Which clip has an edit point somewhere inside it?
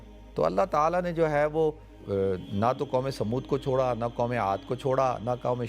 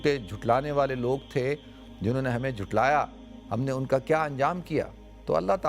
first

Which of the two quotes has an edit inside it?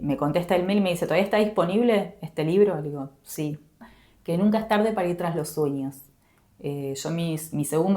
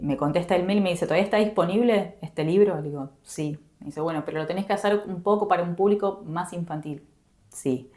first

